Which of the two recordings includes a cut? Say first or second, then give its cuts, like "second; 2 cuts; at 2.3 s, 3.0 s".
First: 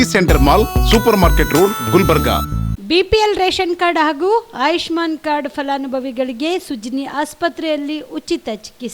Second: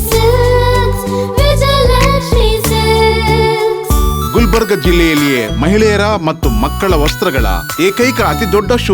first; 1 cut; at 2.7 s